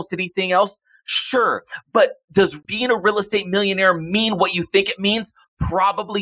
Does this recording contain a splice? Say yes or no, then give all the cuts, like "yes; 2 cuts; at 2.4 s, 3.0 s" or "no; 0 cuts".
yes; 1 cut; at 2.6 s